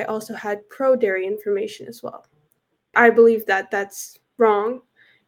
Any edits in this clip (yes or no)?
yes